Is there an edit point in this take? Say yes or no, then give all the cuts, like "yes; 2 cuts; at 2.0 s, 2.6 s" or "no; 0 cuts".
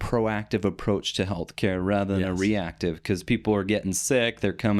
no; 0 cuts